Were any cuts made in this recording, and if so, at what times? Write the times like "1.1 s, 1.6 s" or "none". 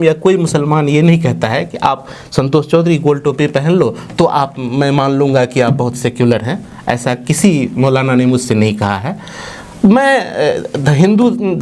none